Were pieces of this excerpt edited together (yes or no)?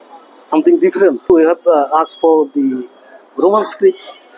yes